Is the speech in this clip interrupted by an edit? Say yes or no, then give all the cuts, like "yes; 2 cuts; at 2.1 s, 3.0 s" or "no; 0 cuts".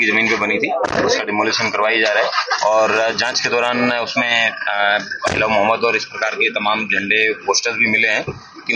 no; 0 cuts